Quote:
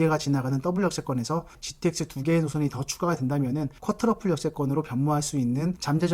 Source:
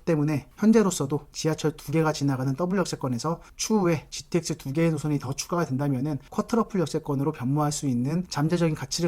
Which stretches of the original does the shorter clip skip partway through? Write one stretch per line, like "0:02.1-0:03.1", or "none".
0:03.5-0:04.1